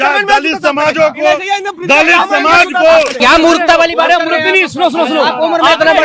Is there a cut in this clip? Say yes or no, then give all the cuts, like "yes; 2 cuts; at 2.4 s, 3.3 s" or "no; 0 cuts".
yes; 1 cut; at 3.1 s